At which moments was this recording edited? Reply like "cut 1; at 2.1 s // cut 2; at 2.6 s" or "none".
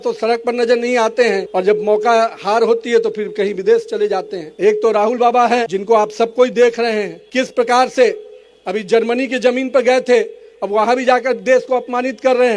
cut 1; at 1.5 s // cut 2; at 4.4 s // cut 3; at 5.7 s // cut 4; at 7.2 s